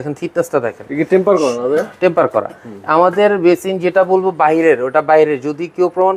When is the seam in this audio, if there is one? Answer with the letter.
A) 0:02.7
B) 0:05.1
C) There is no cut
C